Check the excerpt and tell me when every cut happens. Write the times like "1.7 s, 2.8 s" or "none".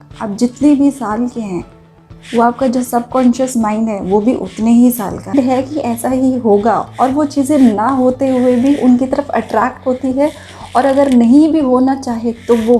5.4 s

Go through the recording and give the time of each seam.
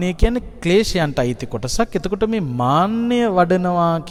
none

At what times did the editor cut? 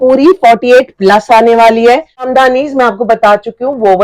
2.3 s

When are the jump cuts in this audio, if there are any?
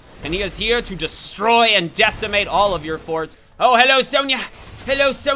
3.4 s

